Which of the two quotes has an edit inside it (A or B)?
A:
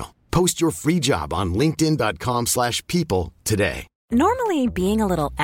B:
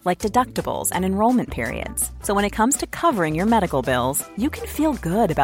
A